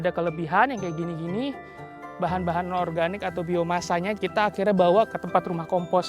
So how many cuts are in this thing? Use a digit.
1